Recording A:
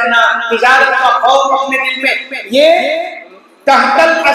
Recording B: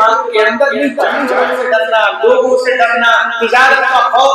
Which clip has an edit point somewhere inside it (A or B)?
B